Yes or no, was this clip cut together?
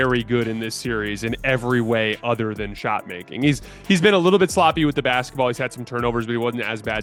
no